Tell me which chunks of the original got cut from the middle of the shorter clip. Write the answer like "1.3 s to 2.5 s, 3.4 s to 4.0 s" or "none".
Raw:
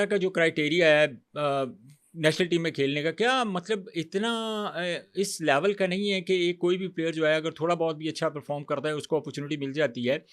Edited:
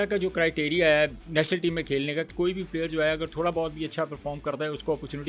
1.2 s to 2.1 s, 3.2 s to 6.5 s